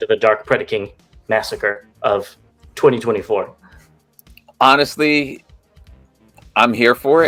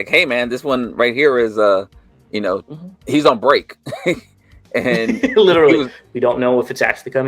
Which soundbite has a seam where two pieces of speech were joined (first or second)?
second